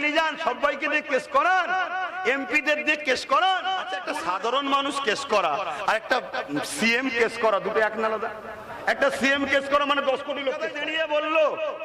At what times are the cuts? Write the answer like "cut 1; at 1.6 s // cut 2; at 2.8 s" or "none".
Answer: cut 1; at 4.0 s // cut 2; at 10.7 s